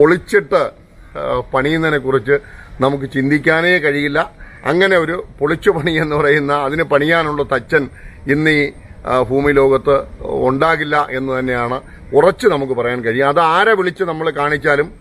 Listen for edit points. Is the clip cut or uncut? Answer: uncut